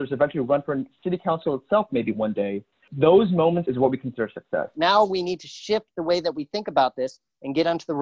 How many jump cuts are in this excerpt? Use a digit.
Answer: 3